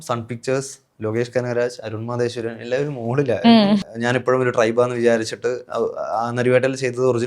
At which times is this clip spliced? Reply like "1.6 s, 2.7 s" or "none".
3.9 s